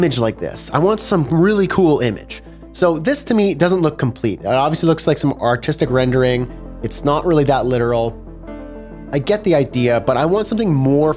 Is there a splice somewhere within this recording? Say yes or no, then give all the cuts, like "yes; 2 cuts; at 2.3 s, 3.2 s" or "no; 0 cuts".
no; 0 cuts